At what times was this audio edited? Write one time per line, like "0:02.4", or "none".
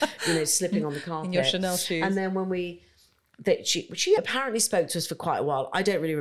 0:04.2